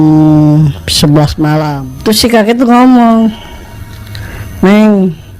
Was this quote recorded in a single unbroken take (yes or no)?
no